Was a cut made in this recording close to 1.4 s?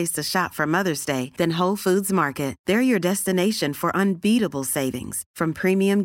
no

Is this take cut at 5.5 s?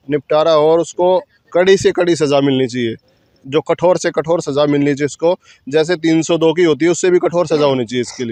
no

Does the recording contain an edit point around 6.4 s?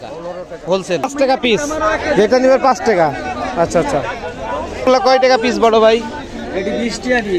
no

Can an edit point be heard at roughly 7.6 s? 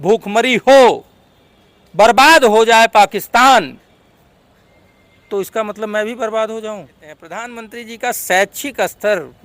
yes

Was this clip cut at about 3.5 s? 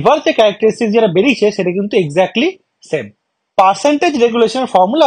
yes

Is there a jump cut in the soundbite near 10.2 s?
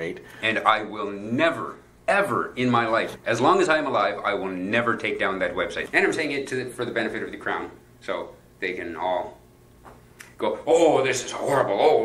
no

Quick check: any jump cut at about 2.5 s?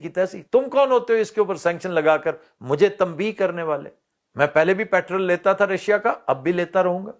no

